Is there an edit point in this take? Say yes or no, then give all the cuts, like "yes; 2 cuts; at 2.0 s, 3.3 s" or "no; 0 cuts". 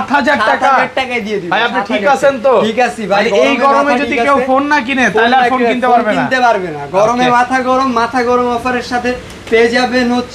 no; 0 cuts